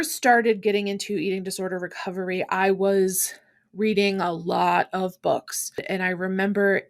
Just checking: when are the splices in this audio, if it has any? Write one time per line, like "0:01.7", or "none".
0:05.8